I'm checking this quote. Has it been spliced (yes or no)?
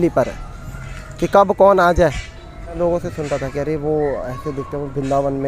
yes